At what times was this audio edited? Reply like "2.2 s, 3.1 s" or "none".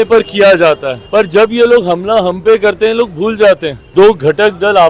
0.9 s, 3.8 s

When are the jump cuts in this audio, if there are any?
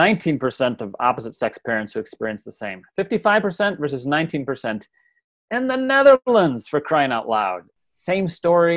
7.7 s

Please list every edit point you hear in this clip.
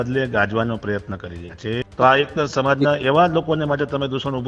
1.8 s

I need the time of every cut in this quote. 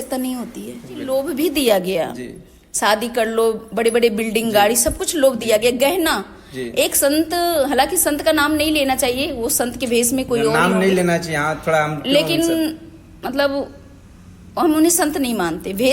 1.0 s

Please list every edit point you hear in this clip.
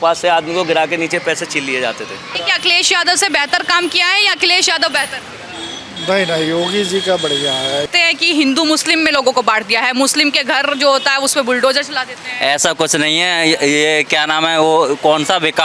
2.4 s, 7.9 s

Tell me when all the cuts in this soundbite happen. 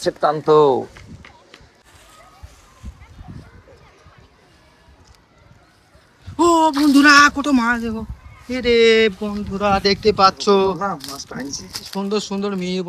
1.6 s

